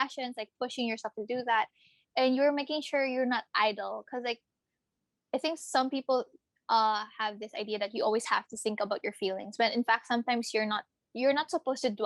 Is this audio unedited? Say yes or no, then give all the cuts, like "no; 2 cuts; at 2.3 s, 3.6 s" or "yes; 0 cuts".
yes; 0 cuts